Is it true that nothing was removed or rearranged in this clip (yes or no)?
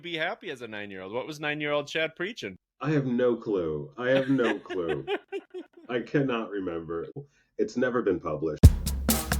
no